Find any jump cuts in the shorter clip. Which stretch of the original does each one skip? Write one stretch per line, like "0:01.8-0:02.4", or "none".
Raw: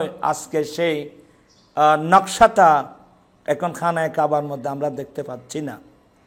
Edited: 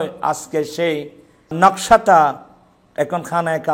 0:01.5-0:02.0